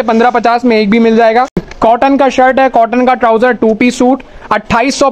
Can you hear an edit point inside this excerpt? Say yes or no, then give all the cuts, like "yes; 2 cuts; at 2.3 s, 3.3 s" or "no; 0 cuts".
yes; 1 cut; at 1.6 s